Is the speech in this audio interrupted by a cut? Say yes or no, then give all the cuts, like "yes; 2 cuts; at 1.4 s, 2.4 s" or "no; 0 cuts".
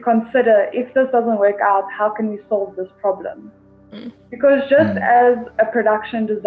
no; 0 cuts